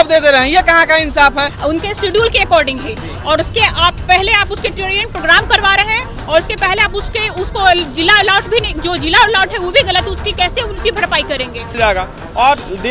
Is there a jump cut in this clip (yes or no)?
yes